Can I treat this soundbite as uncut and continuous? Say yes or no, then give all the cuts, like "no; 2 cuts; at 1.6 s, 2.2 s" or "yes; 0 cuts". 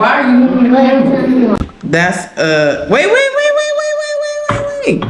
no; 1 cut; at 1.6 s